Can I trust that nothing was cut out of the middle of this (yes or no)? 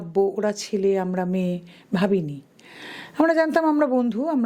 yes